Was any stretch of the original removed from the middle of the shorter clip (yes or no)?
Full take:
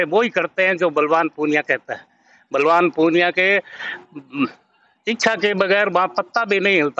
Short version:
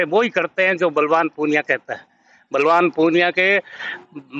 no